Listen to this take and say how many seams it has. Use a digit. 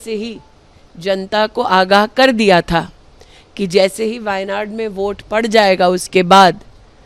0